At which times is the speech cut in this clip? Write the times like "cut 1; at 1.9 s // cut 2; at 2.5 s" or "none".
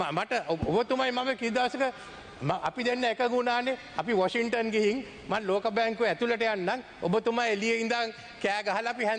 none